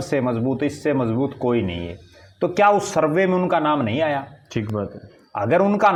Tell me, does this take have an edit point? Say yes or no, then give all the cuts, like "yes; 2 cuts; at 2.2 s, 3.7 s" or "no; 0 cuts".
no; 0 cuts